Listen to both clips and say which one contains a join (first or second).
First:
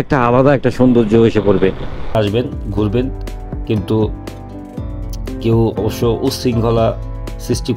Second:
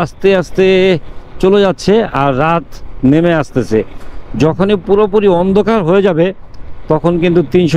first